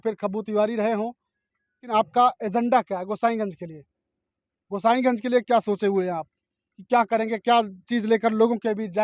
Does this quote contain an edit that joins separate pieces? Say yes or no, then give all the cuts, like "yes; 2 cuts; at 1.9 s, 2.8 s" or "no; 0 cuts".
yes; 1 cut; at 1.9 s